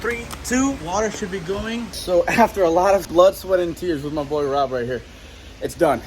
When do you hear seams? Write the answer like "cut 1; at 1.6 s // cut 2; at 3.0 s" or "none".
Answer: cut 1; at 0.8 s // cut 2; at 2.0 s // cut 3; at 3.1 s